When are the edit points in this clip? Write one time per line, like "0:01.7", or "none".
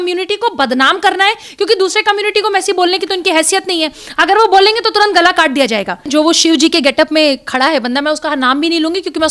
0:06.1